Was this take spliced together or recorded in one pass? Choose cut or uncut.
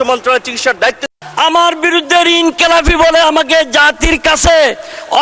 cut